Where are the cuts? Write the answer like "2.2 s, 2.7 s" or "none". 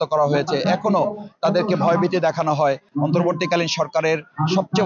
2.9 s